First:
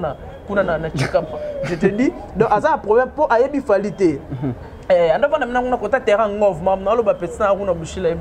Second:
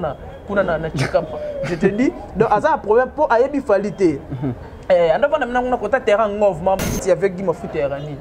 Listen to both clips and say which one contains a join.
second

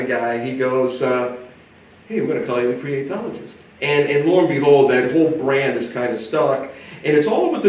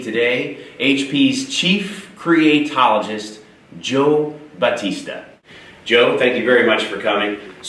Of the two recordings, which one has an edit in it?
first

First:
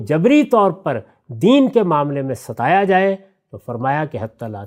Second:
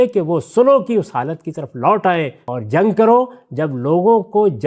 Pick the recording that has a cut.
second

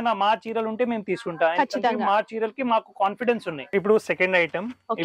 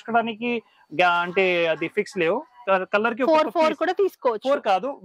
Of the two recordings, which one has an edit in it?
first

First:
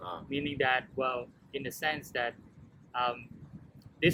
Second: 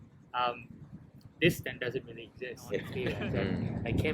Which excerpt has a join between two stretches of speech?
second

